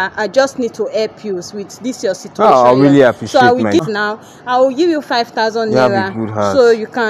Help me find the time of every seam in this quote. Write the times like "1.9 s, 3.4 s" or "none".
3.8 s